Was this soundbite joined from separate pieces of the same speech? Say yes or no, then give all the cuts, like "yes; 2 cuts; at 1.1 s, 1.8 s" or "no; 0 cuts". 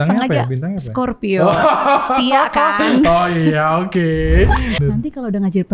yes; 1 cut; at 4.8 s